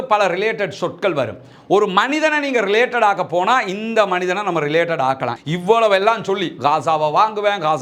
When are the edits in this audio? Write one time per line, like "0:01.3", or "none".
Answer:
0:05.3